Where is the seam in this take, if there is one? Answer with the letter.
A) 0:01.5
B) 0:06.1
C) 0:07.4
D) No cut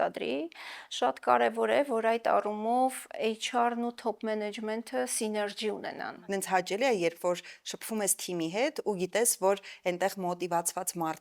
B